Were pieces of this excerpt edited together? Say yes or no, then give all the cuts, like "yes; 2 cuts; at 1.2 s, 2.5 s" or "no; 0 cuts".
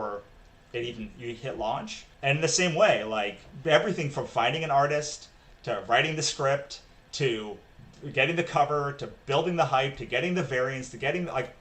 yes; 2 cuts; at 2.0 s, 3.4 s